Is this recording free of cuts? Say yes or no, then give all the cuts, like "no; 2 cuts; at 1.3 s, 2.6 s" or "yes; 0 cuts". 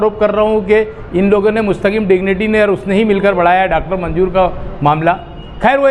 yes; 0 cuts